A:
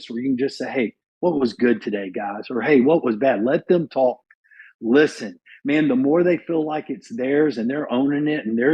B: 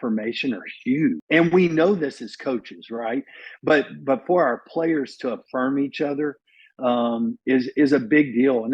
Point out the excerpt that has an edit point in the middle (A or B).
B